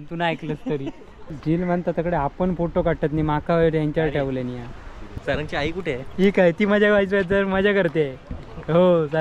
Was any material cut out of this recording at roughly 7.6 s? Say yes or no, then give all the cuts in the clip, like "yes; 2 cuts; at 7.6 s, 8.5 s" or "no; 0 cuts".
no; 2 cuts; at 1.3 s, 5.1 s